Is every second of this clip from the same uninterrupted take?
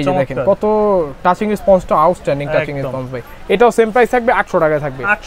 yes; 0 cuts

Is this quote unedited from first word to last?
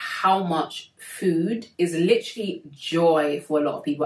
yes; 0 cuts

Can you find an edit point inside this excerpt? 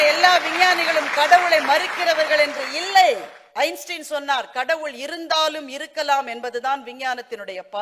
no; 0 cuts

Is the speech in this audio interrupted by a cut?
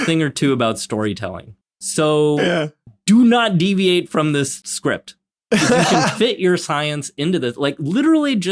yes; 1 cut; at 4.6 s

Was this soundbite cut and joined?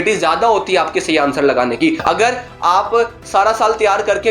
yes; 1 cut; at 2.0 s

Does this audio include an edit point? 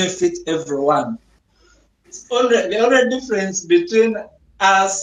yes; 1 cut; at 2.2 s

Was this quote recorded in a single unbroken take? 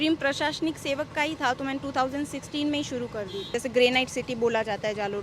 no; 1 cut; at 3.5 s

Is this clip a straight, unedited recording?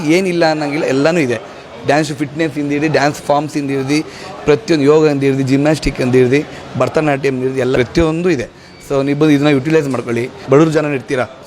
no; 2 cuts; at 7.7 s, 10.5 s

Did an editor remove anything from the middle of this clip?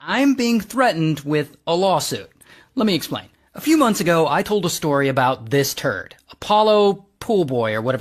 no; 0 cuts

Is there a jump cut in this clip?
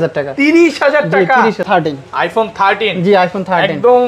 yes; 1 cut; at 1.6 s

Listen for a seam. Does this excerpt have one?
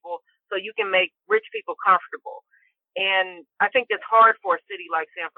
yes; 2 cuts; at 1.2 s, 3.4 s

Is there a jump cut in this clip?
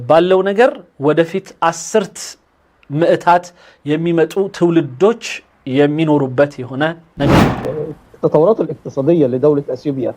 yes; 1 cut; at 7.5 s

